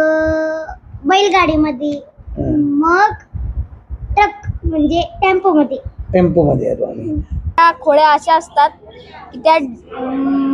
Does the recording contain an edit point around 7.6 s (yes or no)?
yes